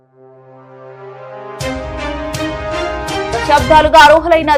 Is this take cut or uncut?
uncut